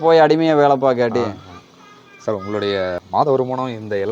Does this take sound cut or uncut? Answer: uncut